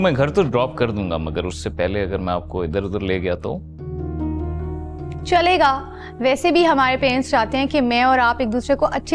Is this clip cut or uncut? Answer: uncut